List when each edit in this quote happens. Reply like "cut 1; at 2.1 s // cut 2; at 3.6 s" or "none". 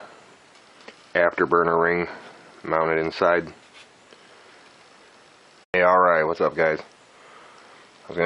none